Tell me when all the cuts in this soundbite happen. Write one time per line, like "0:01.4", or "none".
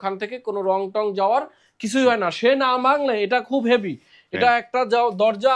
none